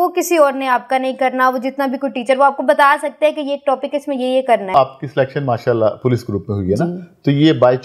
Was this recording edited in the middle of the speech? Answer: yes; 1 cut; at 4.7 s

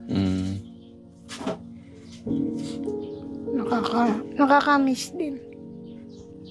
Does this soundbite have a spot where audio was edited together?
yes; 2 cuts; at 2.1 s, 3.4 s

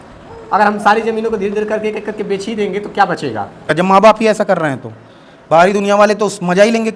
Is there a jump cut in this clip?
yes; 1 cut; at 3.7 s

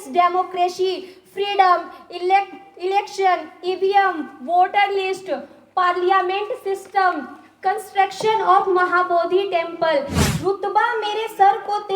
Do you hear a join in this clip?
yes; 1 cut; at 10.2 s

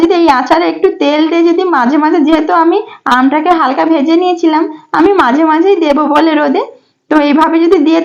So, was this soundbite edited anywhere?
no; 0 cuts

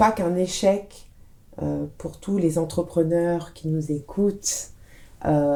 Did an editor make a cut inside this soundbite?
no; 0 cuts

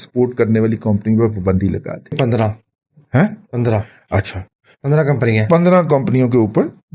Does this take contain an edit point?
yes; 1 cut; at 2.2 s

